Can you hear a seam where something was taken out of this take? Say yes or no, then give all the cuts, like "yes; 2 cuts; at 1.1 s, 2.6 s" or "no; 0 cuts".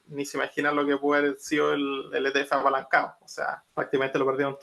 yes; 1 cut; at 3.6 s